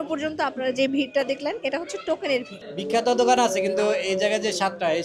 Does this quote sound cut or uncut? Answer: cut